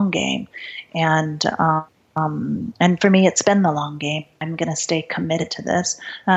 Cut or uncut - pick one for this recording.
cut